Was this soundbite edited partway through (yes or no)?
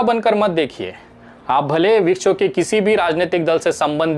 no